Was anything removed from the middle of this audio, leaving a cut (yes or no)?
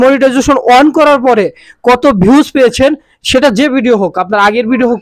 no